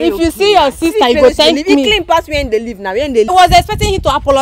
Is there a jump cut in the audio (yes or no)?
yes